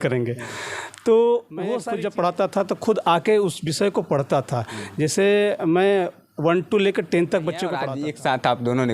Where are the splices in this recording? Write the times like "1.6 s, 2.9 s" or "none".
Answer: 1.8 s, 7.8 s